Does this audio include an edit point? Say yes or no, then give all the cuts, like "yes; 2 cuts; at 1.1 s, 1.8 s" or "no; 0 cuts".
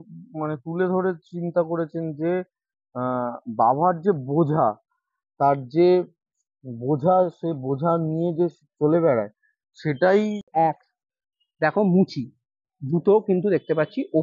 yes; 1 cut; at 10.5 s